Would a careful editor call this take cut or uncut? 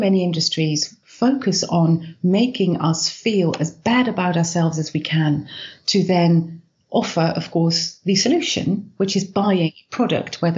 cut